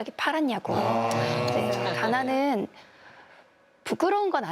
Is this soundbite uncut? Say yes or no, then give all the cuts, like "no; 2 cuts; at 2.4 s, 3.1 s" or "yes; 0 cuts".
no; 1 cut; at 2.0 s